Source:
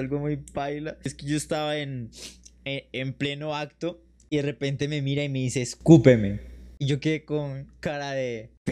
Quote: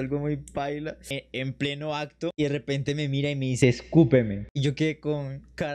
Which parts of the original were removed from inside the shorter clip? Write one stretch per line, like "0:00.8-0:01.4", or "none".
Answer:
0:01.0-0:02.6
0:03.9-0:04.3
0:06.4-0:06.7